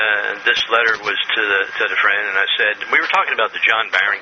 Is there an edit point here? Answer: yes; 1 cut; at 3.0 s

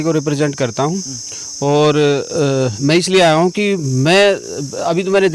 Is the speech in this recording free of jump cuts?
yes; 0 cuts

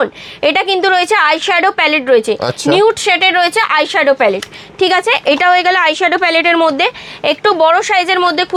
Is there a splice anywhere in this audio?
no; 0 cuts

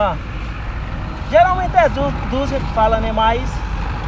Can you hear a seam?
no; 0 cuts

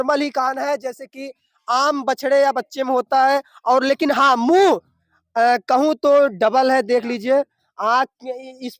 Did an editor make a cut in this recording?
no; 0 cuts

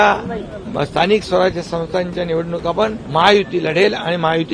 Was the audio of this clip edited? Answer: yes; 1 cut; at 3.0 s

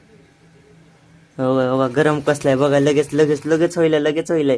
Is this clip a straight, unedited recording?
yes; 0 cuts

